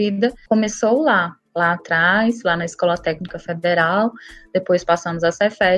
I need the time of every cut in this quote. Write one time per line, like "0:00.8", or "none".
none